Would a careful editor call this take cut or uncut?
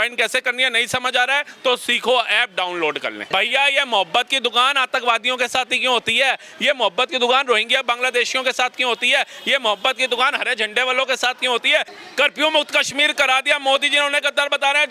cut